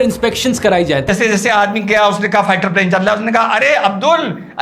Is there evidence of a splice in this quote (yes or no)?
yes